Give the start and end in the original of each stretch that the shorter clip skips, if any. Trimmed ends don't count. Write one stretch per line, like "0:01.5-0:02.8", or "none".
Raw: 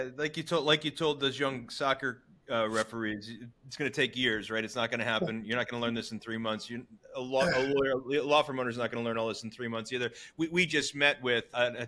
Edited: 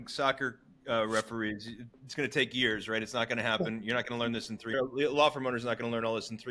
0:06.4-0:07.9